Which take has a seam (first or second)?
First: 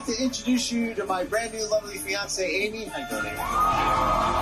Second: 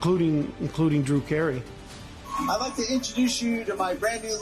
second